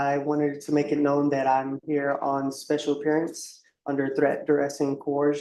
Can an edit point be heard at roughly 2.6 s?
no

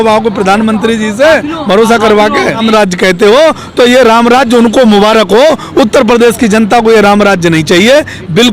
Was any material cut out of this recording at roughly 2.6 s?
yes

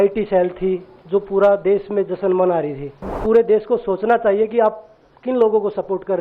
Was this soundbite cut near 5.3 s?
no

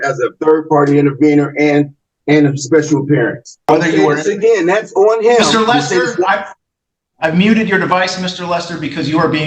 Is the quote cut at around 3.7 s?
yes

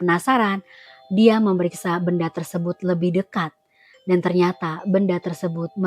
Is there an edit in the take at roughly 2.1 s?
no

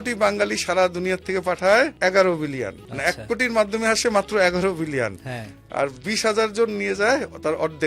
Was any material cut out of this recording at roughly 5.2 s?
no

